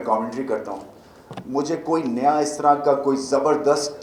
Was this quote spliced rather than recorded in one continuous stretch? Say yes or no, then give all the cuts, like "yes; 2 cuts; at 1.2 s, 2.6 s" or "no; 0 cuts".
no; 0 cuts